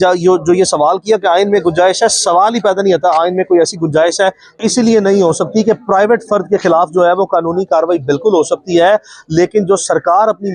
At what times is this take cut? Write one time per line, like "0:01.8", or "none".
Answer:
0:04.6